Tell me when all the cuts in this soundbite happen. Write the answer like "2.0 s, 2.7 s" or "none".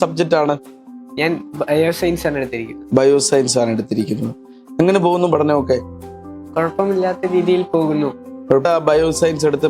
8.6 s